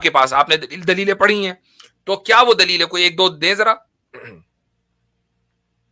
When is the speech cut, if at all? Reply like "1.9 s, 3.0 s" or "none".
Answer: none